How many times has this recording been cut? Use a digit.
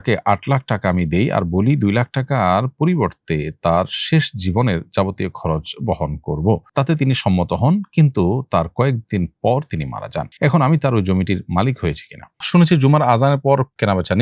1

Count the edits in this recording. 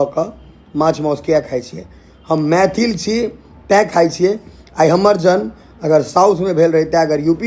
0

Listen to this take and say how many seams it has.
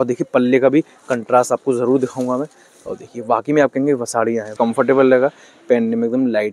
1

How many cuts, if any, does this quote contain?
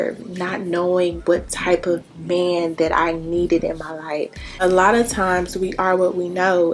1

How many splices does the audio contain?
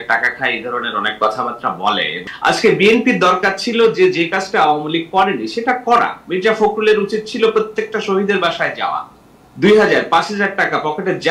1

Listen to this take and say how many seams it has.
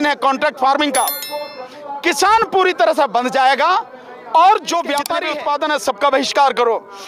1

